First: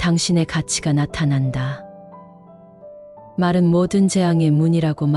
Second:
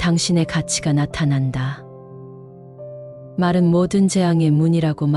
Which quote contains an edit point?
second; 2 cuts; at 1.7 s, 3.3 s

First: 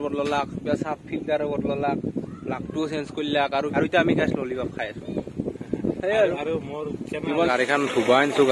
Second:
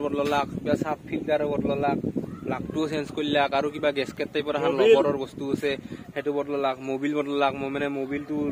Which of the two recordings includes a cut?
first; 2 cuts; at 3.7 s, 7.5 s

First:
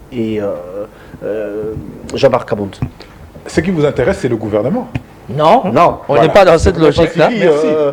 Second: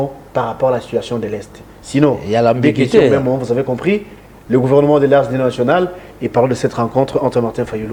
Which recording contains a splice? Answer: first; 1 cut; at 3.3 s

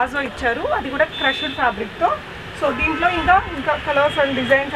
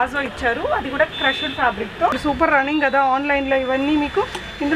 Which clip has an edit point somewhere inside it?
second; 1 cut; at 2.1 s

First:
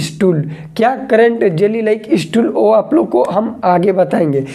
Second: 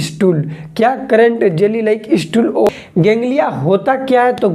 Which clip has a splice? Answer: second; 1 cut; at 2.7 s

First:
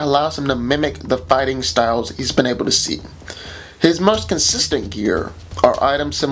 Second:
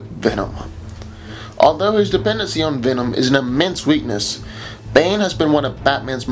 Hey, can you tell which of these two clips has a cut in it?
second; 1 cut; at 5.4 s

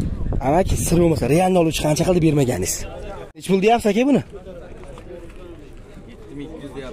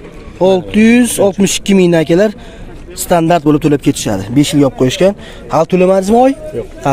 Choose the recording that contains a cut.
first; 1 cut; at 3.4 s

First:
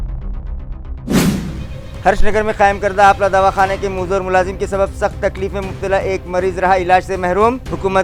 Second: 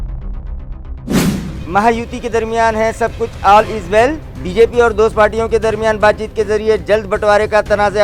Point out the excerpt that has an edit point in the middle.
first; 1 cut; at 1.5 s

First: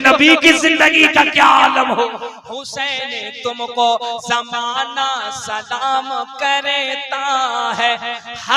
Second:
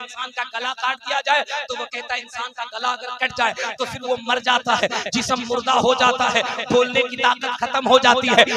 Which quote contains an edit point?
first; 1 cut; at 2.4 s

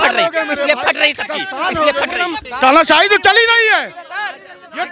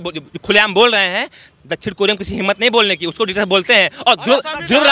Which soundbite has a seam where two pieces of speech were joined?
first; 1 cut; at 2.4 s

